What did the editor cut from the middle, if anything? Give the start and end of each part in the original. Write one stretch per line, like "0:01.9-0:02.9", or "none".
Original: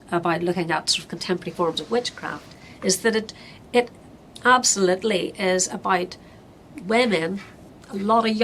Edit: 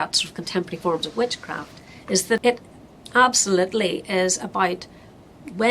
0:03.1-0:03.7